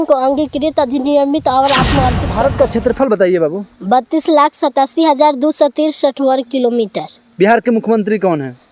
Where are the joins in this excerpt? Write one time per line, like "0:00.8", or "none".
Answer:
0:02.2